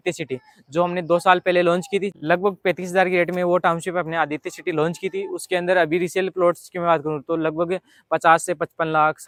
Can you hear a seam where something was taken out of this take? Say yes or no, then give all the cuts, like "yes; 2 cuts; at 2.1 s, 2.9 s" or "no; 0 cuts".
no; 0 cuts